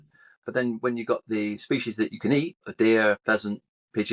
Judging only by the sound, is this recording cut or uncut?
cut